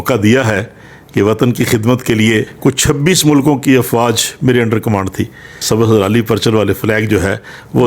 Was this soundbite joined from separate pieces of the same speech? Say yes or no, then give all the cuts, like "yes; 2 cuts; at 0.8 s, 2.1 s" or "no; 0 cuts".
yes; 2 cuts; at 2.5 s, 5.6 s